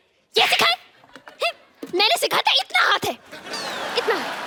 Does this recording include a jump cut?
no; 0 cuts

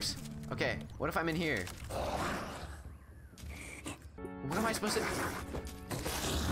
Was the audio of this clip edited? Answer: no; 0 cuts

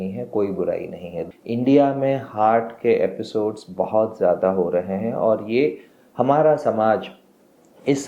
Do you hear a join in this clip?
yes; 1 cut; at 1.2 s

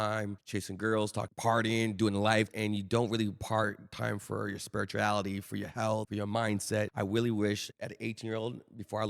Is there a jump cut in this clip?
yes; 1 cut; at 2.5 s

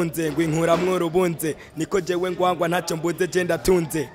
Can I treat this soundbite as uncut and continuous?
yes; 0 cuts

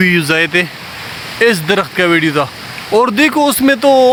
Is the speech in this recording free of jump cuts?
yes; 0 cuts

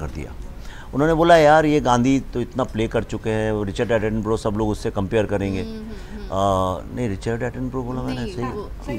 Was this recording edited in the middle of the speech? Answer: no; 0 cuts

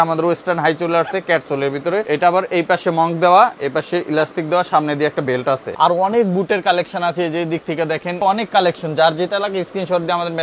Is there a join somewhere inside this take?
yes; 3 cuts; at 2.0 s, 5.7 s, 8.2 s

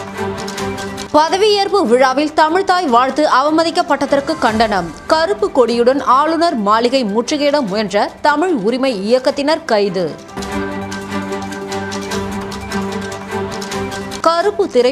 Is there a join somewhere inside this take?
yes; 1 cut; at 1.0 s

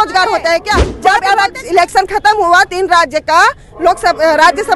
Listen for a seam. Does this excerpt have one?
yes; 1 cut; at 0.9 s

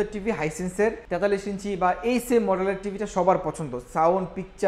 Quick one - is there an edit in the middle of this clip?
yes; 1 cut; at 1.0 s

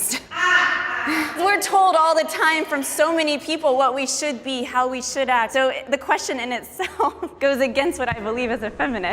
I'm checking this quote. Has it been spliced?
yes; 3 cuts; at 1.4 s, 5.5 s, 7.3 s

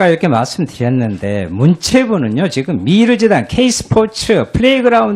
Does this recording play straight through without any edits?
yes; 0 cuts

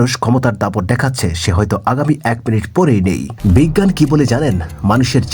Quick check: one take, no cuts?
no; 1 cut; at 3.3 s

